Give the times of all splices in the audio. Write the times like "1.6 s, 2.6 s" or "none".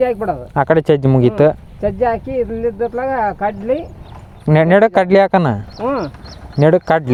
none